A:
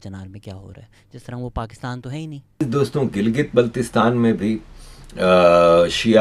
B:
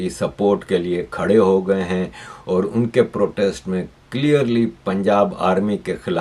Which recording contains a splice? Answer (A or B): A